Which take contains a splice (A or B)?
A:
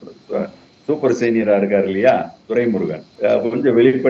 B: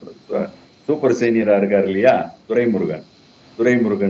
A